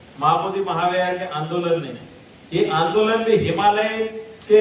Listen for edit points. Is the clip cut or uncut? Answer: uncut